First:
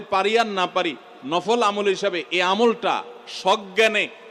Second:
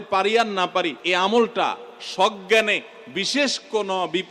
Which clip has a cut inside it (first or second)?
second